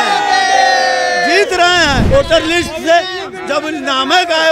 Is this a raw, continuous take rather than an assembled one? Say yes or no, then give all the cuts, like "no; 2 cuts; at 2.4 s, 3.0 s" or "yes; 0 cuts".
no; 1 cut; at 2.0 s